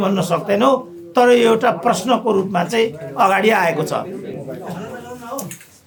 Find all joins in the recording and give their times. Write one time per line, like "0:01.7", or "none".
none